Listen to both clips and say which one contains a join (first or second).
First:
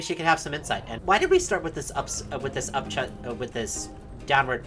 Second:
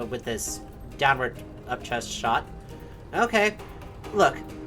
first